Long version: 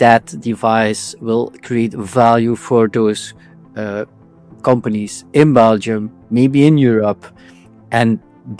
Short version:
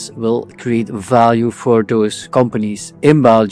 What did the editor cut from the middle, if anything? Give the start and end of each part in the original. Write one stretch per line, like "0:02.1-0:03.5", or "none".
0:03.3-0:04.5